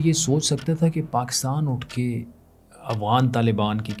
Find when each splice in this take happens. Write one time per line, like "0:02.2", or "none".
none